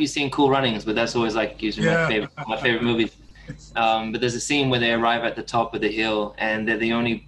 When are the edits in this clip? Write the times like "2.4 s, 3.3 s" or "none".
none